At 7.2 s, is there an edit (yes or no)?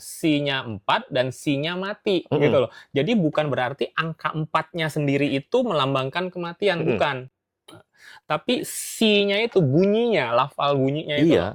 no